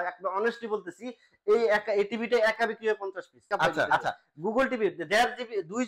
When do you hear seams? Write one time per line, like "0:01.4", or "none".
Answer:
0:03.9